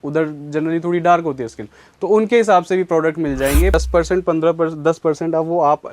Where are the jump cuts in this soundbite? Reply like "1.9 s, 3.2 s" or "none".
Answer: 3.7 s